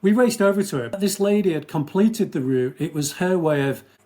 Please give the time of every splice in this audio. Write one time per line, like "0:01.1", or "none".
0:00.9